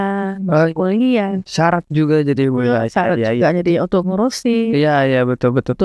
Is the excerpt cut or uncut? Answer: uncut